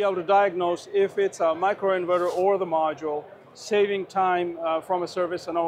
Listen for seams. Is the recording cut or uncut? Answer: uncut